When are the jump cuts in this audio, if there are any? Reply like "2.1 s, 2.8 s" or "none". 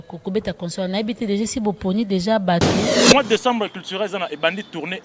3.0 s

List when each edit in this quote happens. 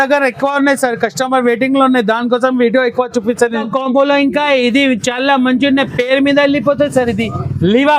3.6 s

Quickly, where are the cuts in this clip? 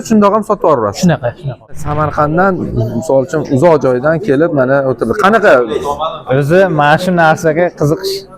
1.7 s

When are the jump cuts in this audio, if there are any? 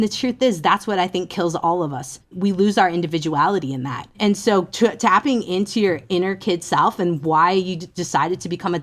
2.3 s, 4.2 s

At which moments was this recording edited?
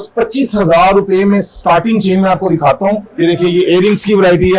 3.1 s

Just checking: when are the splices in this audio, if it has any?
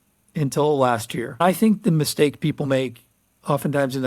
1.4 s

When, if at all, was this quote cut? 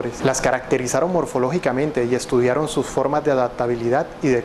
2.6 s

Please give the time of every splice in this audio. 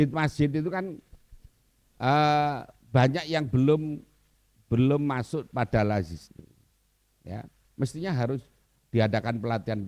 none

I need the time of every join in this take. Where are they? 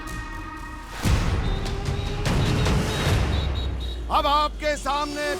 1.5 s

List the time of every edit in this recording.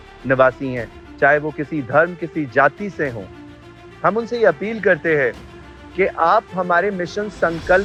none

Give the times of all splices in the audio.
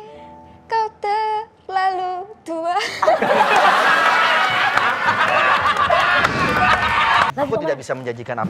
7.3 s

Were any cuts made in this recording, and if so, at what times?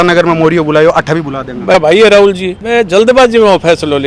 1.7 s, 2.6 s

